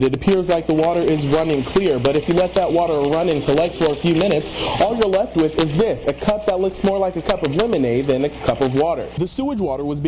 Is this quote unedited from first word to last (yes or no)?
no